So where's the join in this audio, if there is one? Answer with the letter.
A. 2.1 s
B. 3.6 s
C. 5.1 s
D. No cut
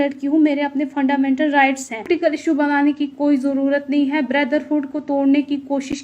A